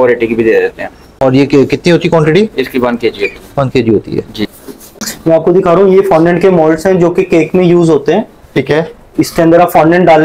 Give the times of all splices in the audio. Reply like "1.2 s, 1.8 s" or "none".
none